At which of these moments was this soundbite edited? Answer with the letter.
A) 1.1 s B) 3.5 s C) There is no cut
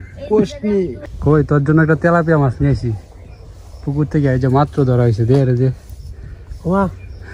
A